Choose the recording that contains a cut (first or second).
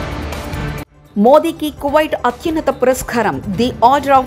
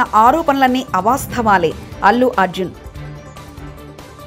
first